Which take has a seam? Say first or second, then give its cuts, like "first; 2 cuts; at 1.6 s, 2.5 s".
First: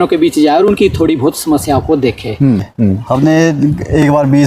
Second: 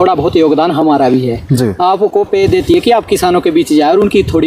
first; 1 cut; at 2.7 s